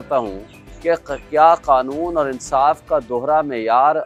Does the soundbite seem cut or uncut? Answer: uncut